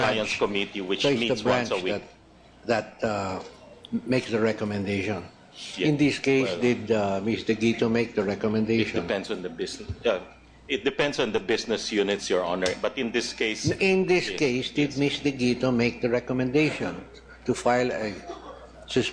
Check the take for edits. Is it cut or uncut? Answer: cut